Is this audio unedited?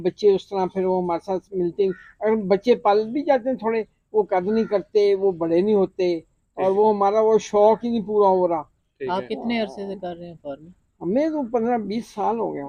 yes; 0 cuts

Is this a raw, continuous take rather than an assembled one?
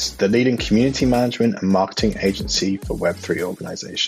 yes; 0 cuts

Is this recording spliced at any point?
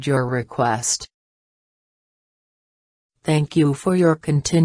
no; 0 cuts

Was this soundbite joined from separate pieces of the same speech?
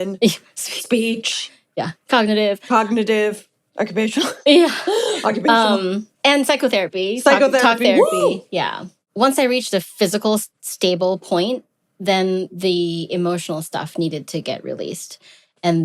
yes; 1 cut; at 9.0 s

